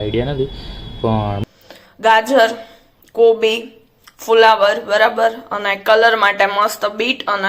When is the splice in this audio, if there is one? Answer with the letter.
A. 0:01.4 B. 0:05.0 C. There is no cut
A